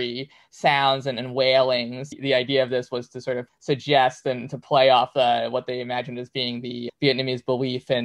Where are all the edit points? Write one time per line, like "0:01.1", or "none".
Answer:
0:02.1